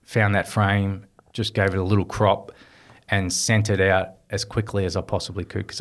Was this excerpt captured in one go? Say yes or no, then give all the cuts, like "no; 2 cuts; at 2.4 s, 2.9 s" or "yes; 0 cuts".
yes; 0 cuts